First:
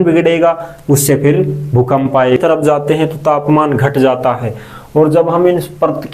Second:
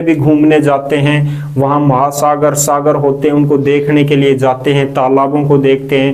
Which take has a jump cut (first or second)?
first